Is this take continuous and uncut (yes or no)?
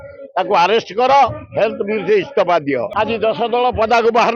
no